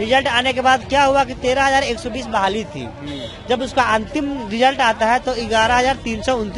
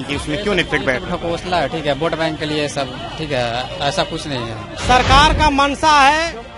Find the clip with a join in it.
second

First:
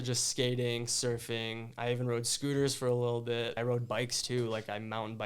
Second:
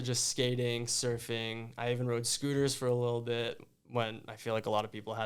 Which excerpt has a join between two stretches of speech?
first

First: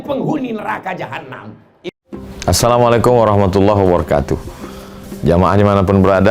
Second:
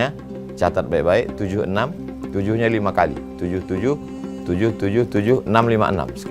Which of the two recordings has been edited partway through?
first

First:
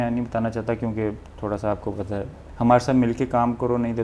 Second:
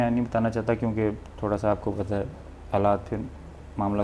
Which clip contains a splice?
first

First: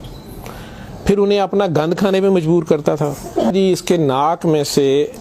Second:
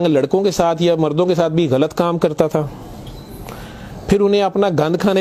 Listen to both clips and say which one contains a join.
first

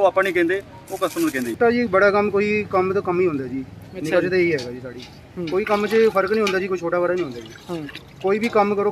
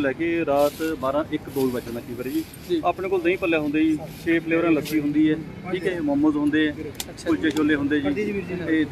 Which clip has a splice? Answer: first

